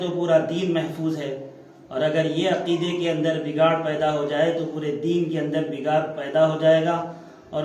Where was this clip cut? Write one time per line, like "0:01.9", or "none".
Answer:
none